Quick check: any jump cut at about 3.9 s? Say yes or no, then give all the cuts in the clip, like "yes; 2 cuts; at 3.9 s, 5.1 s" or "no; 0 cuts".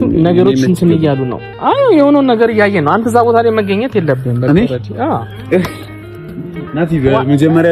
no; 0 cuts